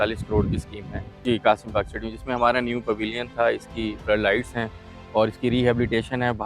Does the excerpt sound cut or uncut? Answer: cut